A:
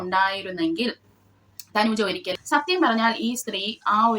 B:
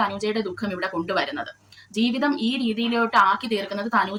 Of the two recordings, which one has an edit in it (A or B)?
A